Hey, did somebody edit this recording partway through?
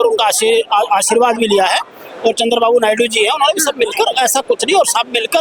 no; 0 cuts

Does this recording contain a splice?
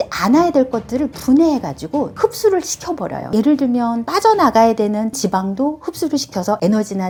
no; 0 cuts

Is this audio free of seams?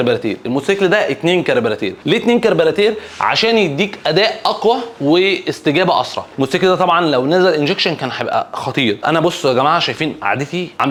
yes; 0 cuts

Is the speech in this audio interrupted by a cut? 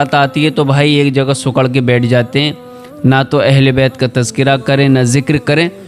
no; 0 cuts

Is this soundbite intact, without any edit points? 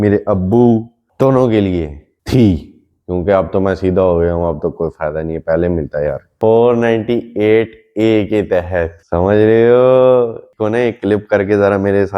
no; 1 cut; at 6.3 s

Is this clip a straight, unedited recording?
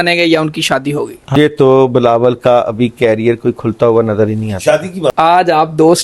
no; 2 cuts; at 1.4 s, 5.1 s

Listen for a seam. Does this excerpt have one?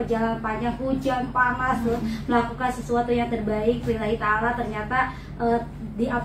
no; 0 cuts

